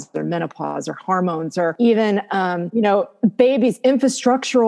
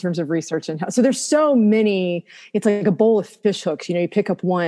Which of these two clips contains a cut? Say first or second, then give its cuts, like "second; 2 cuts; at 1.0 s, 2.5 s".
first; 2 cuts; at 1.7 s, 2.6 s